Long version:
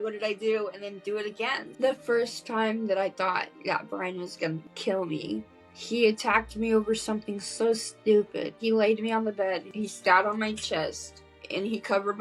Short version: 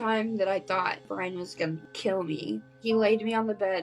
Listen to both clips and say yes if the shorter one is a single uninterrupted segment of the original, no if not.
no